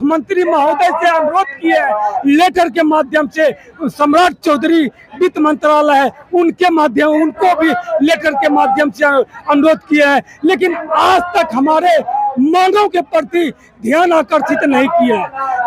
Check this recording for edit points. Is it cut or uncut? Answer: uncut